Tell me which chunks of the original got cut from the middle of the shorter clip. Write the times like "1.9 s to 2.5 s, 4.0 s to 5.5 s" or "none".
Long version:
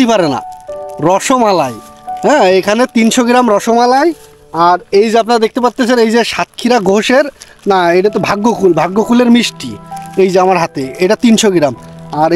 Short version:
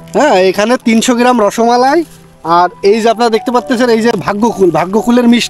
6.3 s to 8.2 s